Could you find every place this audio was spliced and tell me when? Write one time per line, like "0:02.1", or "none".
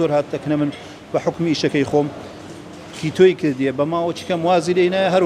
none